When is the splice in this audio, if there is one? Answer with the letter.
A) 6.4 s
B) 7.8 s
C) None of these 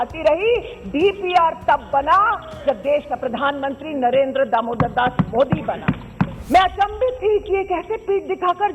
A